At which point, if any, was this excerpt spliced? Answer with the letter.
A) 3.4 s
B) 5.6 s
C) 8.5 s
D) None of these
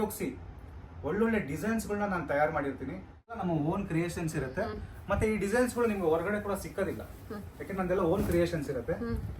A